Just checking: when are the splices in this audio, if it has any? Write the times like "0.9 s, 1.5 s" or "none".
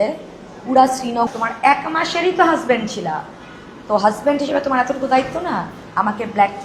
1.3 s